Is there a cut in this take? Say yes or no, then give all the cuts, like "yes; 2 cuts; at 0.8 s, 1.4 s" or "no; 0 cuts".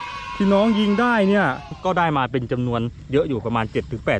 yes; 1 cut; at 1.7 s